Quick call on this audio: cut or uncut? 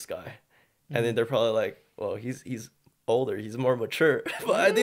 uncut